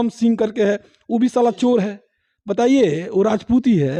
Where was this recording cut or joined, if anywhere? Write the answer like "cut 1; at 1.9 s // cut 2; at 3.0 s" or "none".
none